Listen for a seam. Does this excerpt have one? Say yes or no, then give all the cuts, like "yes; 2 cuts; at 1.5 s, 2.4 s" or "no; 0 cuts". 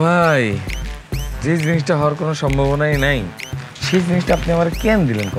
no; 0 cuts